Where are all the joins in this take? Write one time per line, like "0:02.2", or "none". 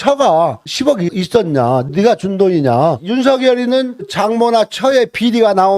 0:03.0
0:04.1